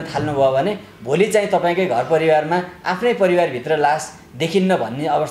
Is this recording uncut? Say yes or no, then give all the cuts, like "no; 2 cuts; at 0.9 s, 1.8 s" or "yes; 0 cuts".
yes; 0 cuts